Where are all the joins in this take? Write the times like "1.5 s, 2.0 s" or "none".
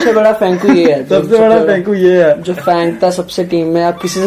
none